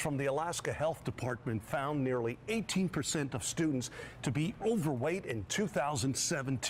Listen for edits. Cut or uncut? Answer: uncut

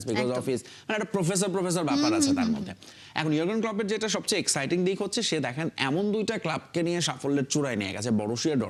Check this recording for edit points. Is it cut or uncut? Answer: uncut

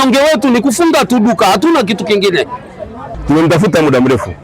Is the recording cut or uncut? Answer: cut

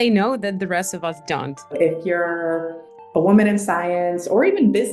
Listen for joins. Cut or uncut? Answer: cut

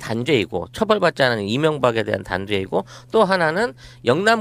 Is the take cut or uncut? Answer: uncut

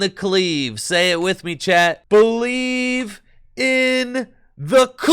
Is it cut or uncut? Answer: cut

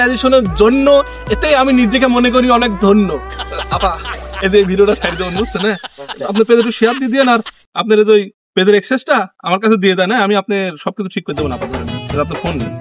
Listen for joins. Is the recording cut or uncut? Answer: uncut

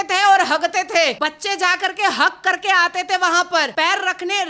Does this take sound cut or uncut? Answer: cut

